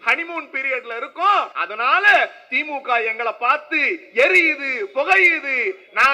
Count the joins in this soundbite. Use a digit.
1